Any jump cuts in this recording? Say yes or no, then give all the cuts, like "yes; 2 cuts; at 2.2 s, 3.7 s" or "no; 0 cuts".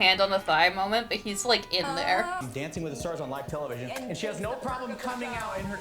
yes; 1 cut; at 2.4 s